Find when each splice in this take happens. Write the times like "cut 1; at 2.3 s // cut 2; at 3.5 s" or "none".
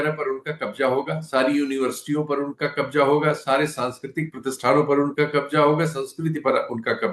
none